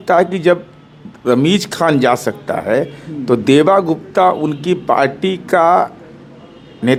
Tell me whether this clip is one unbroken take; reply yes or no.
yes